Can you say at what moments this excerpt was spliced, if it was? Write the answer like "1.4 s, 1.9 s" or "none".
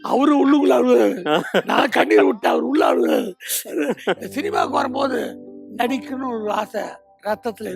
4.2 s